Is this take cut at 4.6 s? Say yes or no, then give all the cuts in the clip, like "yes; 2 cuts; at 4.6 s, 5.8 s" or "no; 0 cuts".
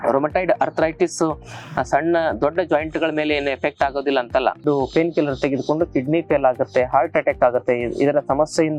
yes; 1 cut; at 4.6 s